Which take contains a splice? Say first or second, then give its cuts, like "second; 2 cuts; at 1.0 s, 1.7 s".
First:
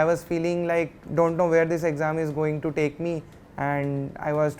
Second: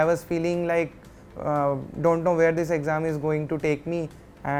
first; 1 cut; at 1.0 s